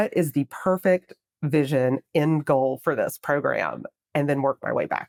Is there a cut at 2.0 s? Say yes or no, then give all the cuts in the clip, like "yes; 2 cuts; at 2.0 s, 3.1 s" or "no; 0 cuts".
no; 0 cuts